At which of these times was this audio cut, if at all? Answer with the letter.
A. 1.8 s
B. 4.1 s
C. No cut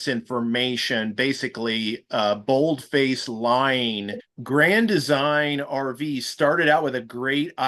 B